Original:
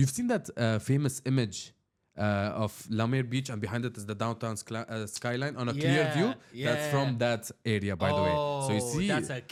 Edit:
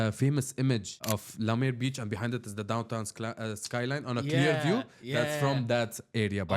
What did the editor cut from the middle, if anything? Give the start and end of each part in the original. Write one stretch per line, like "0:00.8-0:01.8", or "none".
0:01.7-0:02.5